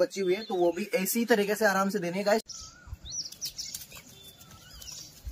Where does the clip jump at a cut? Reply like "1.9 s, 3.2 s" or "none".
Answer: 2.4 s